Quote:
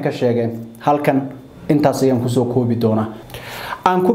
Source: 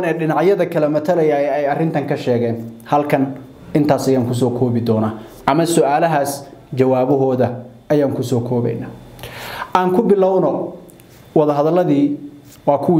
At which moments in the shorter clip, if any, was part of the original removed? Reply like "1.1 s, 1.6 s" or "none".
3.2 s